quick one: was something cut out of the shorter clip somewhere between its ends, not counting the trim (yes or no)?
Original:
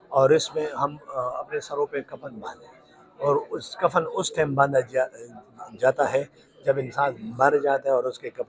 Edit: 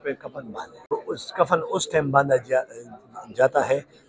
yes